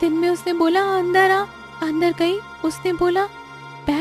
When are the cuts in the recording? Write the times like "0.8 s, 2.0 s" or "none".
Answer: 1.6 s, 2.5 s